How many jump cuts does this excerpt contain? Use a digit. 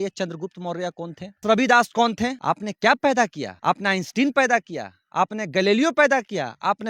3